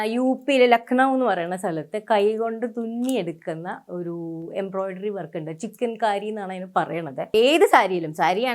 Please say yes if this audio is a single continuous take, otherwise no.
no